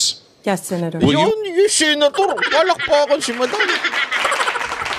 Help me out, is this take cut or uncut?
uncut